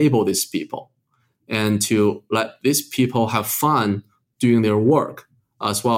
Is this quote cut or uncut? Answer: uncut